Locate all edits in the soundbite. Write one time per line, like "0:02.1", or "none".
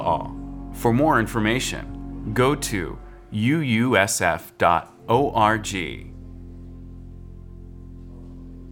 0:06.0